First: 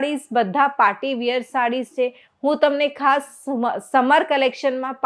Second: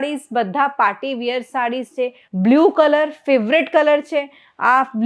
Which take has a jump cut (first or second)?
second